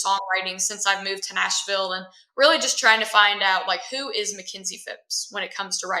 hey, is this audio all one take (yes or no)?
yes